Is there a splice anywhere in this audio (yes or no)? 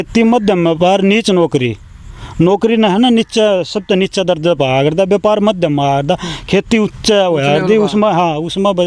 no